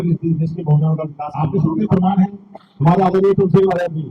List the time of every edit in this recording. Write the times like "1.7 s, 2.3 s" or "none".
1.4 s